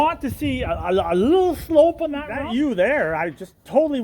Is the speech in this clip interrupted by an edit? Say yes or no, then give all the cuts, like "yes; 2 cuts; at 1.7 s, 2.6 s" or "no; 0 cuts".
yes; 1 cut; at 2.4 s